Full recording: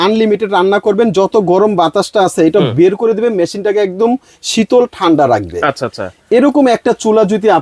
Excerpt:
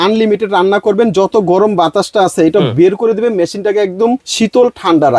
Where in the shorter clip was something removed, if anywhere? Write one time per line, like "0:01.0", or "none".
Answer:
0:04.3